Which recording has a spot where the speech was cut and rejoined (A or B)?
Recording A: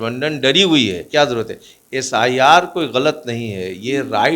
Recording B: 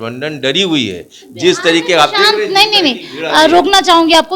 A